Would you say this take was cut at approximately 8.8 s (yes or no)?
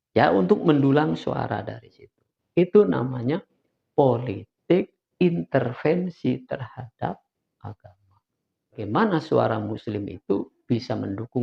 yes